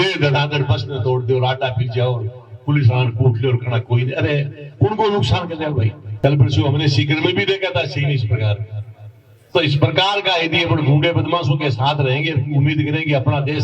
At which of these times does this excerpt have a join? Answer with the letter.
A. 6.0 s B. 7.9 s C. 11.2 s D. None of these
A